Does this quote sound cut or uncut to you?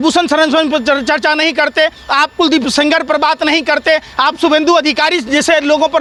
uncut